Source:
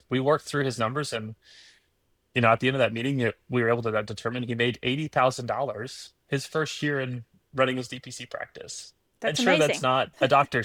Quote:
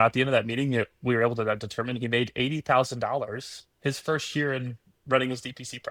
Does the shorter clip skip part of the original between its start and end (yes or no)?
no